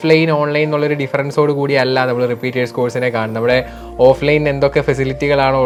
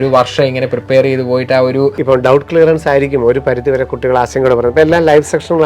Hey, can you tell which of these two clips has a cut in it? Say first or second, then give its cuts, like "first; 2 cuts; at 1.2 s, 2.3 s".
second; 1 cut; at 2.0 s